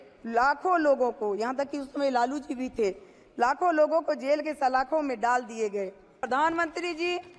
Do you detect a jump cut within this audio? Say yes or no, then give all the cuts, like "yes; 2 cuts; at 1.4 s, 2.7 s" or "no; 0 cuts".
yes; 1 cut; at 6.2 s